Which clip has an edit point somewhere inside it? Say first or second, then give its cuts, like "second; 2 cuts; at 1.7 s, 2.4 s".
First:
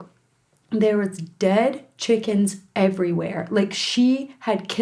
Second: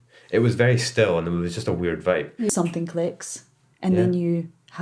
second; 1 cut; at 2.5 s